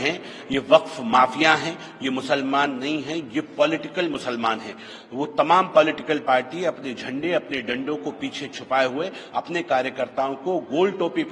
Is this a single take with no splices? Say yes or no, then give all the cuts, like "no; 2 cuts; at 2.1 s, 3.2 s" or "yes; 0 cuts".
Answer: yes; 0 cuts